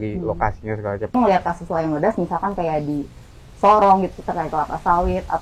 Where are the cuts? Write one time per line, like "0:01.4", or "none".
0:01.1